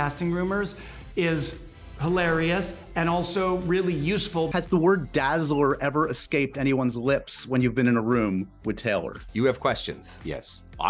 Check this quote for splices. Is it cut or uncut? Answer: uncut